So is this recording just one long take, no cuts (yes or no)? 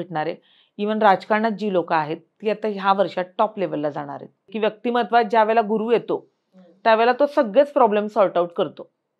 no